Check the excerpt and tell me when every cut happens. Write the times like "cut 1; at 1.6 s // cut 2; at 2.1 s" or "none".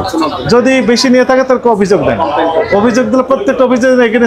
none